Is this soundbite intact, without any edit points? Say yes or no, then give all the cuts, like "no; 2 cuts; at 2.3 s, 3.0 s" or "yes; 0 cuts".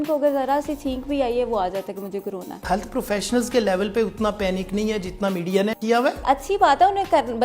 no; 2 cuts; at 2.6 s, 6.2 s